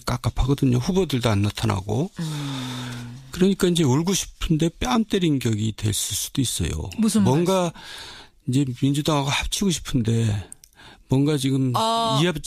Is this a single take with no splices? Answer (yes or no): yes